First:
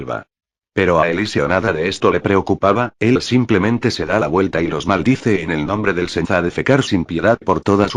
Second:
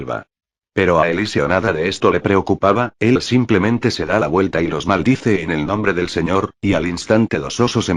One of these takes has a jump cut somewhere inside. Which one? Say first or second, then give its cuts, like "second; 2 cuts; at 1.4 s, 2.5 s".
second; 1 cut; at 6.3 s